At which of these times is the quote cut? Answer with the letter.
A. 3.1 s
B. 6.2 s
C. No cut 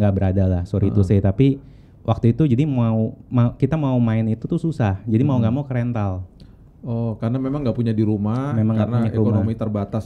C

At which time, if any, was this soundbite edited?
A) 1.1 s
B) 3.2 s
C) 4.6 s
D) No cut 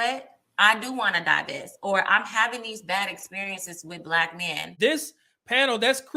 C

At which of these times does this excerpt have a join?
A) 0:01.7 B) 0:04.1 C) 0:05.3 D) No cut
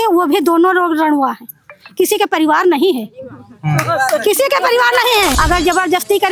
C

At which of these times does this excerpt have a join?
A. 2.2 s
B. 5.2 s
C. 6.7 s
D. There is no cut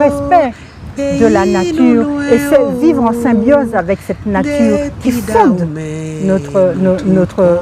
D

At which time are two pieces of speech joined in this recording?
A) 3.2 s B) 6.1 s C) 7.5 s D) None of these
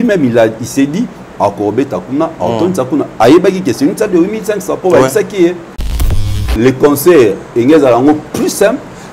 B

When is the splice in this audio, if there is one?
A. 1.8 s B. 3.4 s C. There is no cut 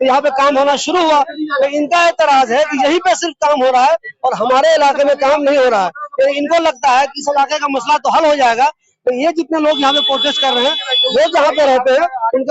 C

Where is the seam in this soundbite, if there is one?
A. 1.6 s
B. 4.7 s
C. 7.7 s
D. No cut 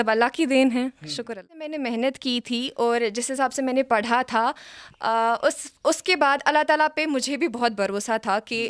A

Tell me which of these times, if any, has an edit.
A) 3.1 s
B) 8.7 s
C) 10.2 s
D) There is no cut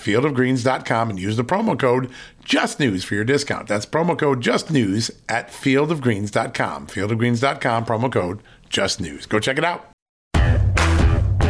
C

